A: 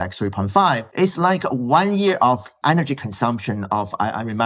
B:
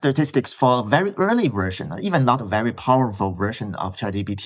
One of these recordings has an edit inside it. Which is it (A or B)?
A